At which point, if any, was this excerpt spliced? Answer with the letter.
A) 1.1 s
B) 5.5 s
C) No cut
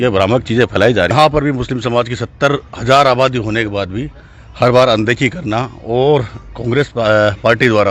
A